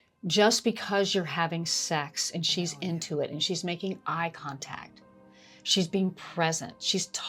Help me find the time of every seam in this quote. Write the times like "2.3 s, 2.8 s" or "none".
none